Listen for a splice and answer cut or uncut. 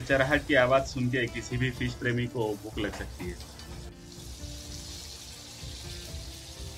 uncut